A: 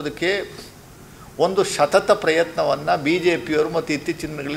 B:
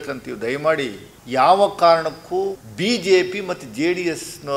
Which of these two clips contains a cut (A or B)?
B